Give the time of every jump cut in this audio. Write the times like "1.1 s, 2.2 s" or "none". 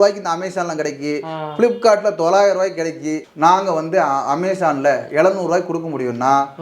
3.2 s